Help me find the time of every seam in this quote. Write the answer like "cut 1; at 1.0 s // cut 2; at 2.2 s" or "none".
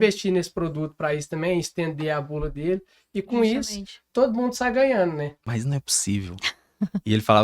cut 1; at 5.4 s

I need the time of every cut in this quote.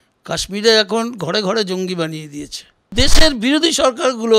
cut 1; at 2.9 s

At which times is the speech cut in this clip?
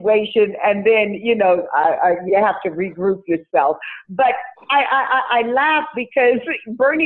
none

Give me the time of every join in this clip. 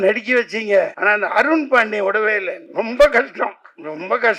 cut 1; at 1.0 s // cut 2; at 2.6 s

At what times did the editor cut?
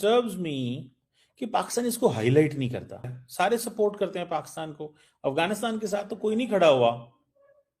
none

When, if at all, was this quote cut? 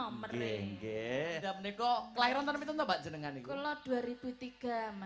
cut 1; at 1.5 s

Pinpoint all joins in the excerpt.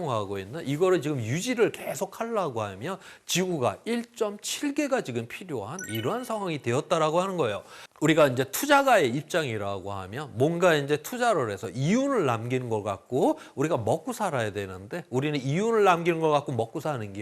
none

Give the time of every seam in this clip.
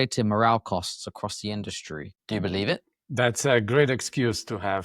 cut 1; at 2.1 s

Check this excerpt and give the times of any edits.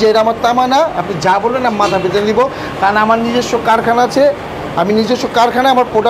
none

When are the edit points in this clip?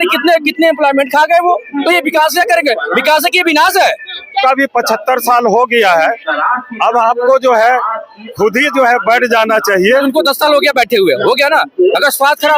cut 1; at 4.4 s // cut 2; at 9.9 s

